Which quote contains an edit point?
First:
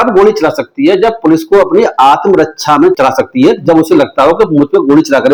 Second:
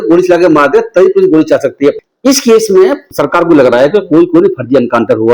second; 1 cut; at 2.1 s

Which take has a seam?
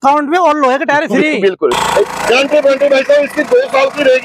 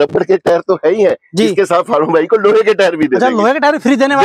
first; 1 cut; at 1.8 s

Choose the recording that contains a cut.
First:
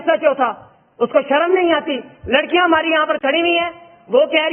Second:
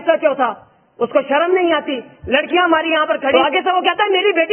second; 1 cut; at 3.3 s

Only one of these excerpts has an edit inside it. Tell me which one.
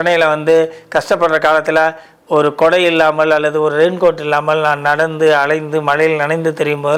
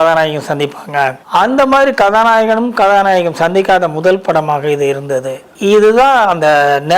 second; 2 cuts; at 1.2 s, 5.4 s

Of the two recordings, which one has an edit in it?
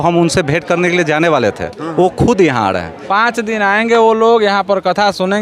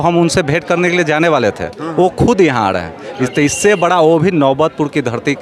first; 1 cut; at 2.9 s

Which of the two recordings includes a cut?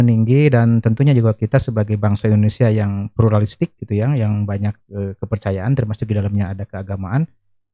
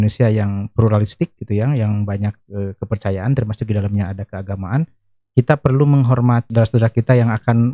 second; 1 cut; at 6.5 s

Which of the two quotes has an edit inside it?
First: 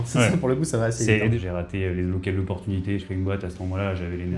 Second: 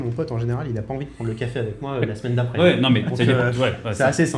first; 2 cuts; at 1.3 s, 3.1 s

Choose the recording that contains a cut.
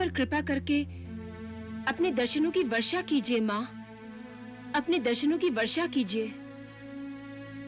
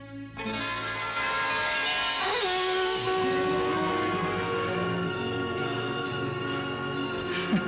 second; 1 cut; at 4.8 s

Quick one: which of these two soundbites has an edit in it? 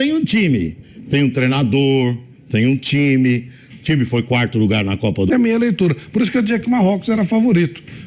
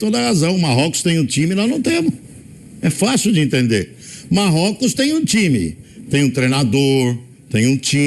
first; 1 cut; at 5.3 s

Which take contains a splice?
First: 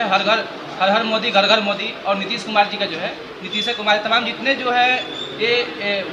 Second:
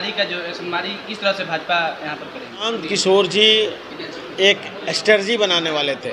second; 1 cut; at 2.7 s

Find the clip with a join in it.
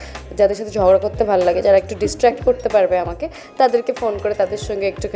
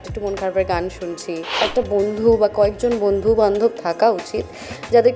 second; 1 cut; at 1.5 s

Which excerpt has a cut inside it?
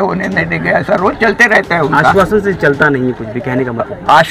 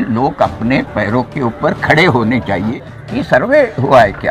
second; 1 cut; at 2.7 s

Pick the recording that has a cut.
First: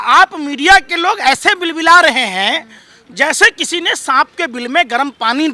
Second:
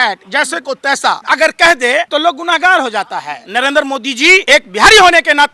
second; 4 cuts; at 1.2 s, 2.1 s, 3.4 s, 4.4 s

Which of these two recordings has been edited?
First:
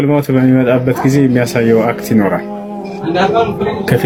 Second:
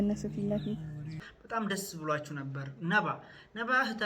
second; 1 cut; at 1.2 s

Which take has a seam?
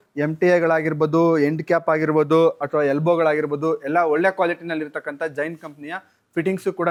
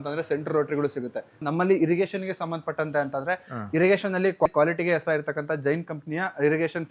second; 2 cuts; at 1.4 s, 4.5 s

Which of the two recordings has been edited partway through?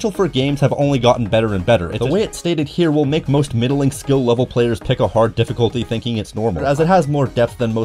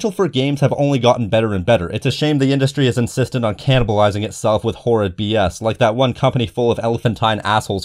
first; 2 cuts; at 1.9 s, 6.6 s

